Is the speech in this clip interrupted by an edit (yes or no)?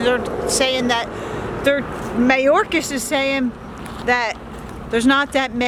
no